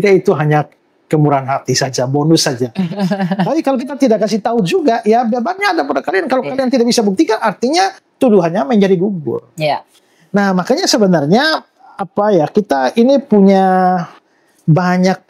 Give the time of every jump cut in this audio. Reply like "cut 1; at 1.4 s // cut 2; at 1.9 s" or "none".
none